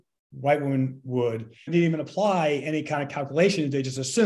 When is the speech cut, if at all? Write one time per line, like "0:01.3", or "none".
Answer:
0:01.7